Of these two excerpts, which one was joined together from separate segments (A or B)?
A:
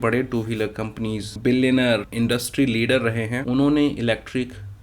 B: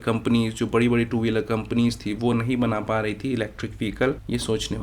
A